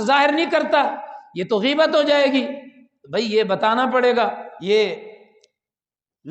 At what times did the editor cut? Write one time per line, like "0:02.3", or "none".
0:04.5